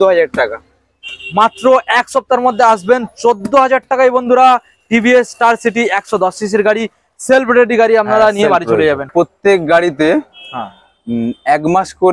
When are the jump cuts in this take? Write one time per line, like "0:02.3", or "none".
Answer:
0:09.1